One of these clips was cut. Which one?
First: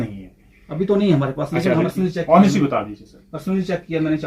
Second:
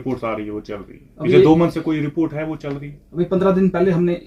first; 1 cut; at 1.8 s

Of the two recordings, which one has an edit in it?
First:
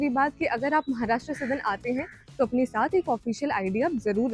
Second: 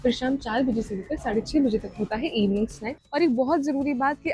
second; 1 cut; at 2.9 s

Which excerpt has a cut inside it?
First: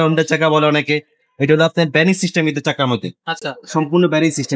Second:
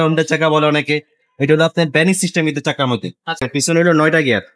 second; 1 cut; at 3.4 s

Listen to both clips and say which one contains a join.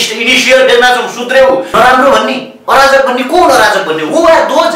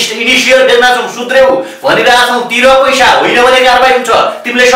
first; 1 cut; at 1.7 s

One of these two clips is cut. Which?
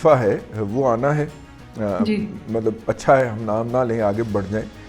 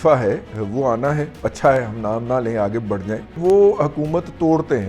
second; 2 cuts; at 1.4 s, 3.3 s

